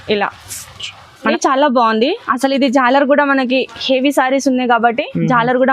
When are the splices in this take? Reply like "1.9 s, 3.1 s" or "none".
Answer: 1.3 s